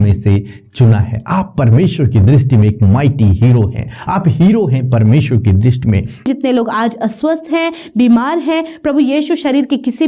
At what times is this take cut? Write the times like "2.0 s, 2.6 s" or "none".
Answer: 6.3 s